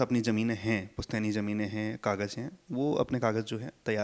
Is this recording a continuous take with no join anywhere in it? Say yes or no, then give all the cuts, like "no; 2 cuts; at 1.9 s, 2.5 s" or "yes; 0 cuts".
yes; 0 cuts